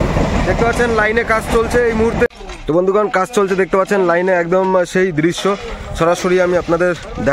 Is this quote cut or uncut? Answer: cut